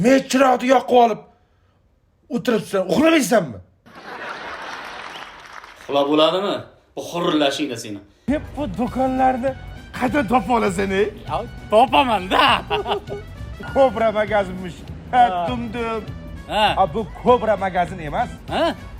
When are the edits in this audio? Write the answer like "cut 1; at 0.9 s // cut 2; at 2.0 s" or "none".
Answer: cut 1; at 8.1 s